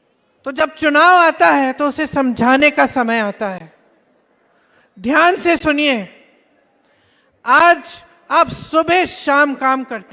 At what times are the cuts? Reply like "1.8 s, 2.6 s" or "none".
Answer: none